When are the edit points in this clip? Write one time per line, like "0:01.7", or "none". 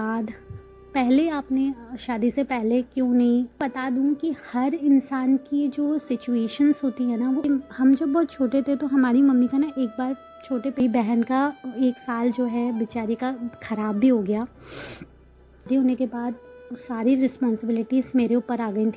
0:03.6
0:07.4
0:10.8
0:15.6